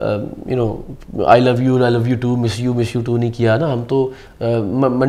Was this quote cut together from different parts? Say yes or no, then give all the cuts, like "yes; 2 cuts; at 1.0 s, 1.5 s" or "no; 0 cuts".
no; 0 cuts